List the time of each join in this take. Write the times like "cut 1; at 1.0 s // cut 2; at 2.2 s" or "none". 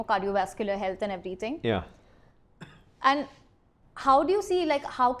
none